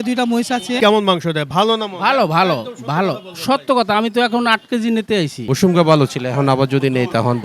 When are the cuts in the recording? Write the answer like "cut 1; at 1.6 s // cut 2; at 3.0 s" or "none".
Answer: cut 1; at 0.8 s // cut 2; at 5.4 s